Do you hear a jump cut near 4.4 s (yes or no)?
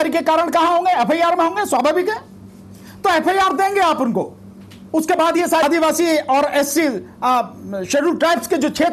no